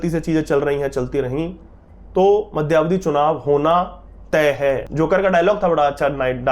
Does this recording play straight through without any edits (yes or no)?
no